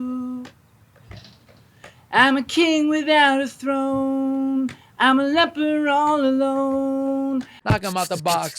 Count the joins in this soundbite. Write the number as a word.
one